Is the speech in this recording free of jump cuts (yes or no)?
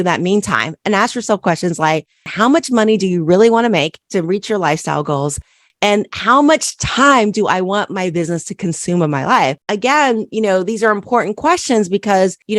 no